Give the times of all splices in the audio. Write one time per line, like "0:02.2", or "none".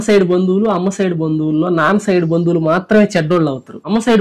none